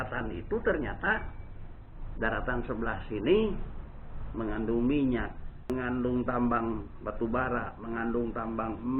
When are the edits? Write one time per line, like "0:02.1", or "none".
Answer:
0:05.7